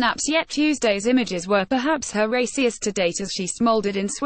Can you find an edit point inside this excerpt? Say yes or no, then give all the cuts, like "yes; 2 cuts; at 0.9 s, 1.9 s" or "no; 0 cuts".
no; 0 cuts